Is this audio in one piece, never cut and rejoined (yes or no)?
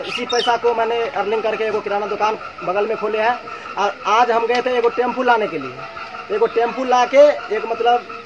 yes